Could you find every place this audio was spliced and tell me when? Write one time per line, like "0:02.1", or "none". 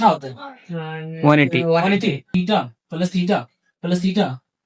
0:02.3